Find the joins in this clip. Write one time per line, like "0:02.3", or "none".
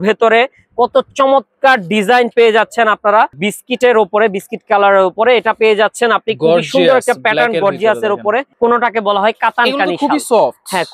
0:03.4
0:08.5